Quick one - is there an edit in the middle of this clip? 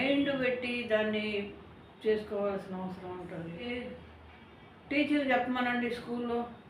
yes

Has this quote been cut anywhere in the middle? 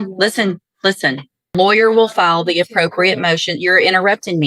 yes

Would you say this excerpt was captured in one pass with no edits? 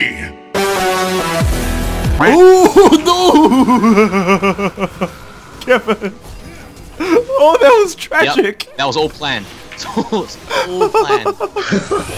yes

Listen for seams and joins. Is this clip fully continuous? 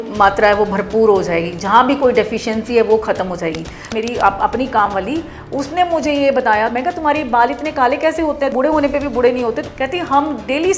no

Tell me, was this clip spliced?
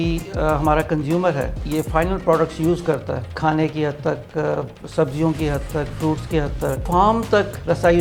yes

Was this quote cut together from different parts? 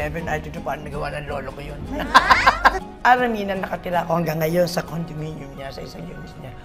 yes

